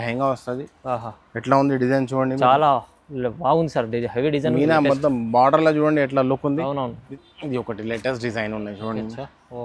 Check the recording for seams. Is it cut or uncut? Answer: cut